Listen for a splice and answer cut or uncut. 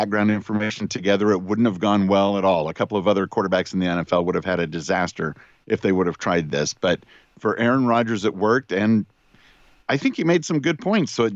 uncut